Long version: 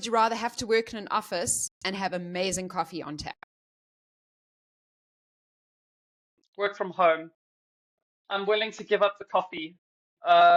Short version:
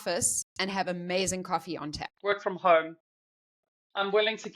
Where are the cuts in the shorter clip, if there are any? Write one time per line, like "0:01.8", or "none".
0:02.1

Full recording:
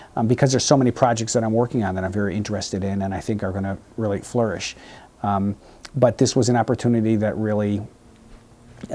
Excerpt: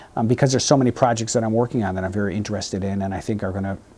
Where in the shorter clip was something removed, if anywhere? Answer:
none

